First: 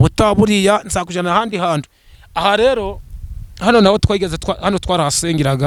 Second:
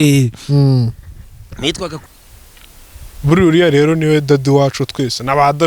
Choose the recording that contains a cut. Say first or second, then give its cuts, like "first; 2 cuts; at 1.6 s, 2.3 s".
second; 1 cut; at 2.0 s